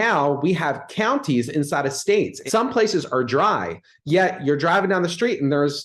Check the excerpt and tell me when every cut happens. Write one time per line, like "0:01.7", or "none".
0:02.4